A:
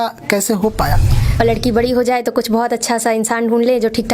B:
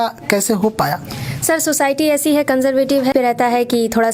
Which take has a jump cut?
A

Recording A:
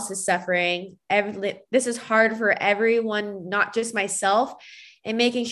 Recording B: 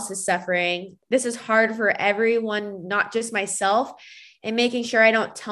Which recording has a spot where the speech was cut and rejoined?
B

